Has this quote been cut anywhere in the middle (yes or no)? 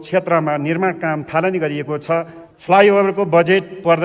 yes